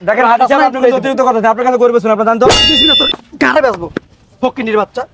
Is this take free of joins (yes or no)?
no